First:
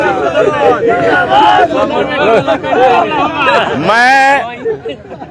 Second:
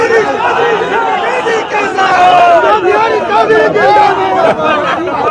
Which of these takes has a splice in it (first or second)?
second